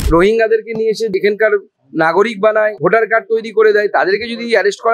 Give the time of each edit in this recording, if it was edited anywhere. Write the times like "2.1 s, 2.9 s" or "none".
1.1 s, 2.8 s